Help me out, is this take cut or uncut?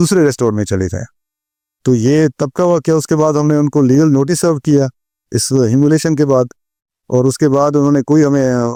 uncut